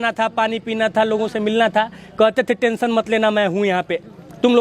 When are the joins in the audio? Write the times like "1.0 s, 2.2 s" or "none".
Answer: none